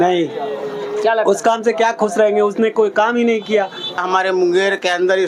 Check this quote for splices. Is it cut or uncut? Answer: cut